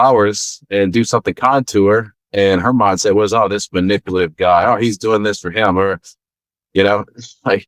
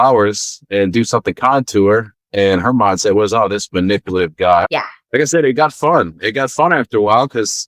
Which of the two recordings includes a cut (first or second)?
second